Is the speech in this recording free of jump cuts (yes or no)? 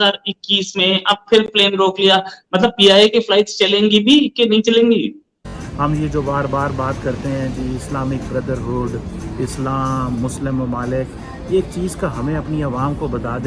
no